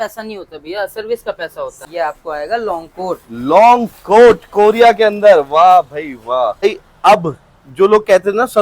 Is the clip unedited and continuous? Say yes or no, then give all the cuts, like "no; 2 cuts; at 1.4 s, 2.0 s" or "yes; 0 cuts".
no; 2 cuts; at 1.8 s, 6.6 s